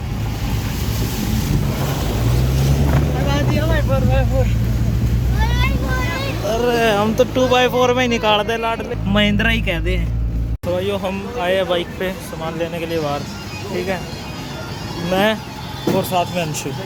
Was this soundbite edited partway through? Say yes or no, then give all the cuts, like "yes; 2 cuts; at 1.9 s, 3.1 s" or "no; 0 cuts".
no; 0 cuts